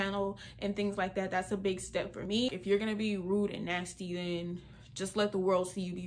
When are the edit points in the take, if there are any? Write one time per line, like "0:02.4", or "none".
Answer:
0:02.3